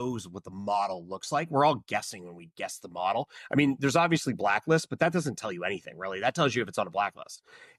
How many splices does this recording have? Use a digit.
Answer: 0